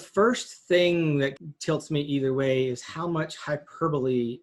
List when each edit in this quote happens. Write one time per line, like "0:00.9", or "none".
0:01.4